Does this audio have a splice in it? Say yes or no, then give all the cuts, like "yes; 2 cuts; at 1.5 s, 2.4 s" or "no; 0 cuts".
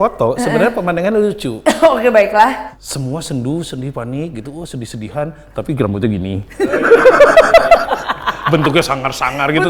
yes; 1 cut; at 2.6 s